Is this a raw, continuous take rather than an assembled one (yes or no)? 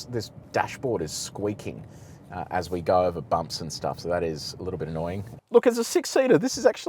no